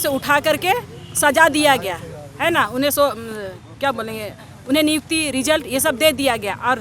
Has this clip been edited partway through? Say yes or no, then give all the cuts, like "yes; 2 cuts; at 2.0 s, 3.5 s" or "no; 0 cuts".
no; 0 cuts